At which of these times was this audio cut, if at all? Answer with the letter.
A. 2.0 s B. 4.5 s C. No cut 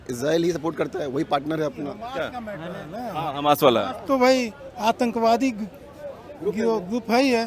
C